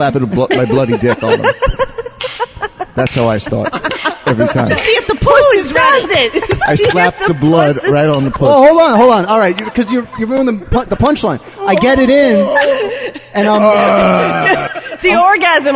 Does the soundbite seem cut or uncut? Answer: cut